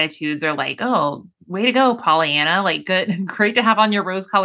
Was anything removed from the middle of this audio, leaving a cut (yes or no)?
no